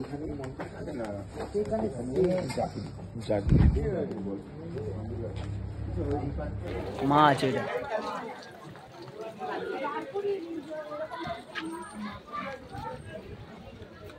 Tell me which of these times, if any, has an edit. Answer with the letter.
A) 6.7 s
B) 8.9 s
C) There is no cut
A